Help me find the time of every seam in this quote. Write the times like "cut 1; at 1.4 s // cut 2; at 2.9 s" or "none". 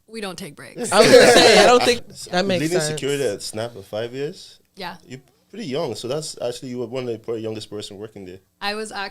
cut 1; at 2.0 s